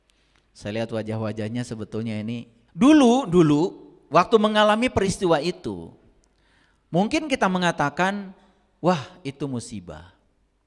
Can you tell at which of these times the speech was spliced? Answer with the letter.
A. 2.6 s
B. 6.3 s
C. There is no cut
A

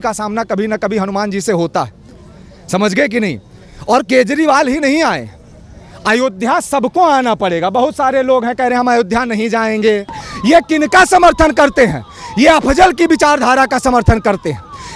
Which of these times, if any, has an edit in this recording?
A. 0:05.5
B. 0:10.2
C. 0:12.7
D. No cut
B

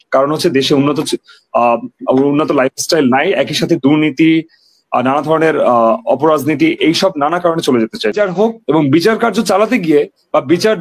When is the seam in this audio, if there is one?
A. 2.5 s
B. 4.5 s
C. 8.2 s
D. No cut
C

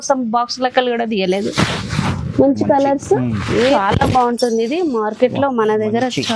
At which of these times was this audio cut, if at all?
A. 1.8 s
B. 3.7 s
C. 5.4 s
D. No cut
B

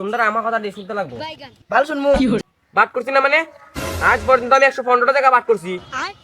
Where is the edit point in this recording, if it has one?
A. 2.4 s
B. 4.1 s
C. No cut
A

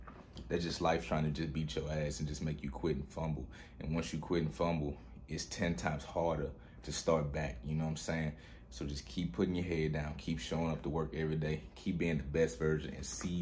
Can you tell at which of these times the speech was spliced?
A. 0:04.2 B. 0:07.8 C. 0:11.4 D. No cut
D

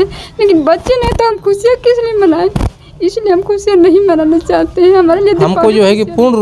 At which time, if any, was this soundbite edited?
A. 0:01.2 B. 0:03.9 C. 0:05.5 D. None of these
C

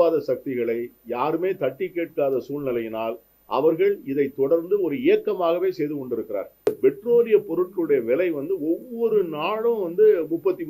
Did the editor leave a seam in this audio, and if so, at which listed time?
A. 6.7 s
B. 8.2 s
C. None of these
A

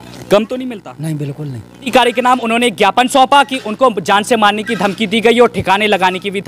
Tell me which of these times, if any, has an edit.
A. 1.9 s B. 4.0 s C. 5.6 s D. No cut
A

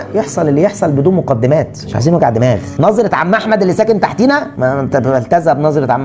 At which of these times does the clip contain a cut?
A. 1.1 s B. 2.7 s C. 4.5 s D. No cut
B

